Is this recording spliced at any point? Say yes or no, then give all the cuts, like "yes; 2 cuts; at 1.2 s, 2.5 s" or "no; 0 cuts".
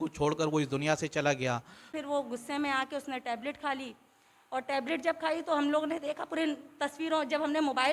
yes; 1 cut; at 1.9 s